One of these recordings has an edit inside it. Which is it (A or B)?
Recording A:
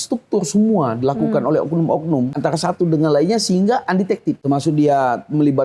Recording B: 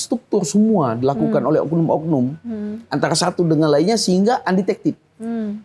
A